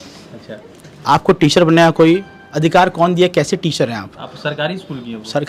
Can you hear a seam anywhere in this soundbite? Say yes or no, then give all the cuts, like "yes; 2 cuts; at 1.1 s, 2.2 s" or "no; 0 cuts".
no; 0 cuts